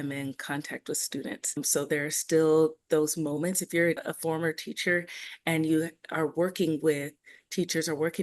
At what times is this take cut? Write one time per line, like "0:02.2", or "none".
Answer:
0:01.6
0:04.1